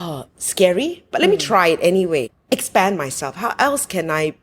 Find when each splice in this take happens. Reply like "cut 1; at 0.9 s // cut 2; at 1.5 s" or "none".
cut 1; at 2.3 s